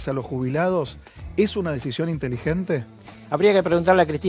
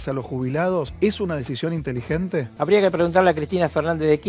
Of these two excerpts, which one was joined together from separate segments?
second; 2 cuts; at 0.9 s, 2.5 s

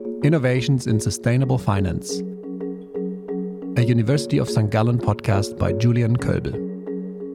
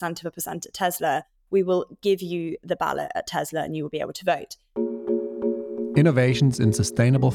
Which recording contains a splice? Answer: second; 1 cut; at 4.6 s

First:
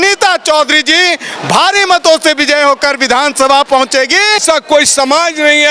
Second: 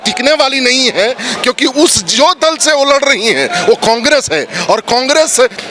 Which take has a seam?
first; 1 cut; at 4.4 s

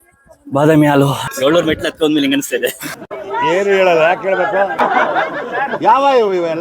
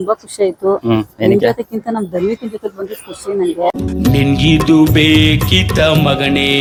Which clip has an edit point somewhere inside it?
first; 1 cut; at 1.2 s

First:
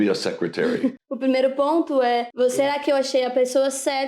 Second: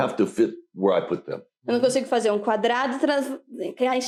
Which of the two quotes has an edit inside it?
first; 2 cuts; at 1.1 s, 2.3 s

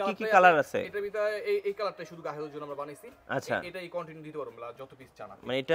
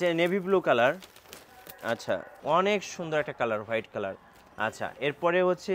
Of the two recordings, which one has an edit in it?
second; 1 cut; at 2.3 s

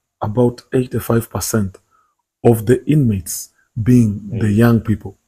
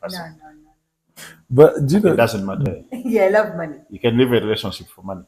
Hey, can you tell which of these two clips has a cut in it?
second; 1 cut; at 2.7 s

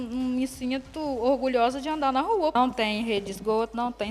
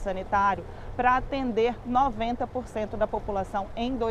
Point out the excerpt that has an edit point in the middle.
first; 1 cut; at 2.5 s

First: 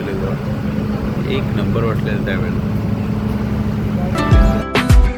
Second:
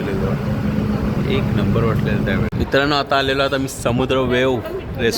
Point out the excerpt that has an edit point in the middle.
second; 1 cut; at 2.5 s

